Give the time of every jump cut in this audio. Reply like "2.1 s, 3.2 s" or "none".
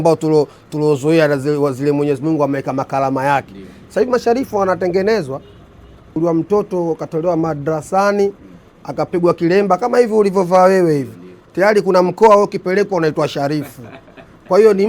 6.1 s